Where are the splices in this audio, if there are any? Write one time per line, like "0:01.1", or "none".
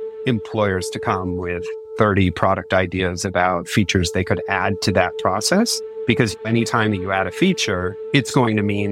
0:01.8
0:06.3
0:07.9

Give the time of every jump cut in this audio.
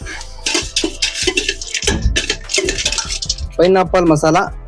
0:03.0

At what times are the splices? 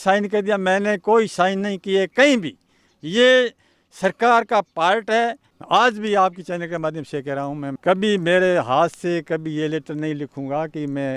0:05.5
0:07.8

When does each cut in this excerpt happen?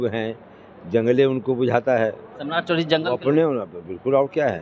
0:02.3

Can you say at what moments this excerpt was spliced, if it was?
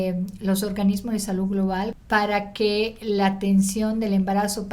0:01.9

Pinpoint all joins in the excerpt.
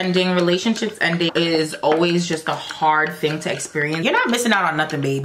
0:01.3
0:04.0

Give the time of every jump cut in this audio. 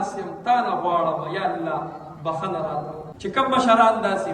0:03.0

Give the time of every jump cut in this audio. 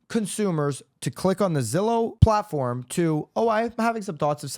0:02.1

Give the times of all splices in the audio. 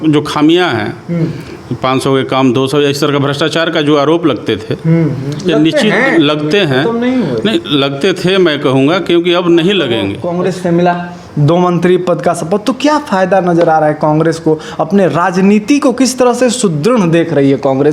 0:10.2

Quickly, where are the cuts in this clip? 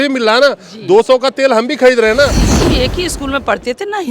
0:02.5

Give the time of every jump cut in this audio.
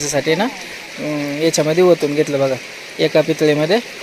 none

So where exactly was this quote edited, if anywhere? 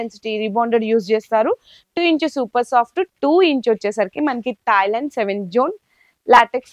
none

